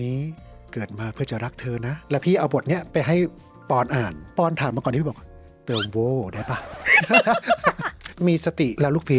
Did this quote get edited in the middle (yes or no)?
yes